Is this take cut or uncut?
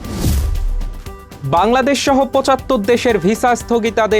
cut